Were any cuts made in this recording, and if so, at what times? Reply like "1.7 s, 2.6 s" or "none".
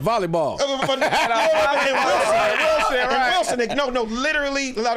none